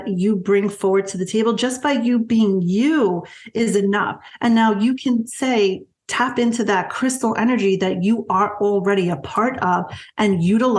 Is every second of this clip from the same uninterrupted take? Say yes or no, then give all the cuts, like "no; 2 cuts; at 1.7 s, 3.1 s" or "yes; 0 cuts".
yes; 0 cuts